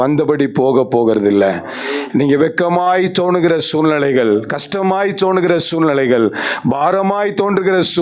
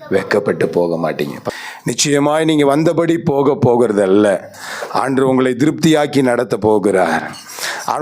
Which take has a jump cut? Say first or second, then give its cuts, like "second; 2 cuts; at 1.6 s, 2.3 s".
second; 1 cut; at 1.4 s